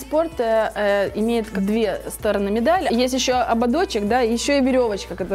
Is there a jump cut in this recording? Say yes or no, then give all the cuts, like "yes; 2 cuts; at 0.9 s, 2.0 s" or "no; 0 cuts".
yes; 2 cuts; at 1.5 s, 2.9 s